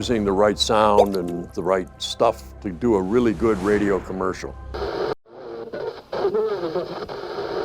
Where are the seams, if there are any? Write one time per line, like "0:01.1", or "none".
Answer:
0:05.2
0:06.8

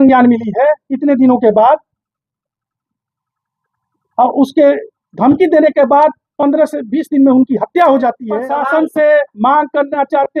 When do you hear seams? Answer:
0:08.2

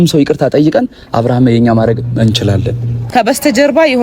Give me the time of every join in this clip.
0:03.0

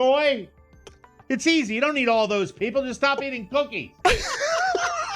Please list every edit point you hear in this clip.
0:01.2
0:04.0

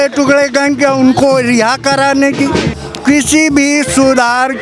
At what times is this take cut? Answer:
0:02.7

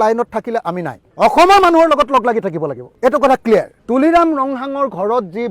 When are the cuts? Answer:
0:03.8

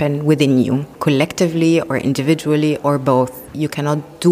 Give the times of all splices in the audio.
none

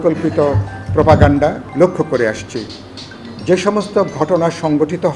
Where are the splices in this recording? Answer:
0:01.6

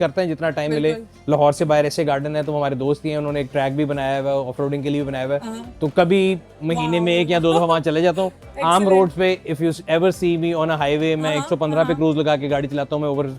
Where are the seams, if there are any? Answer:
none

